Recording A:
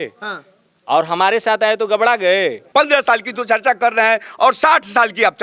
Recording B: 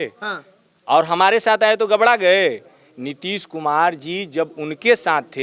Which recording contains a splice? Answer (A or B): A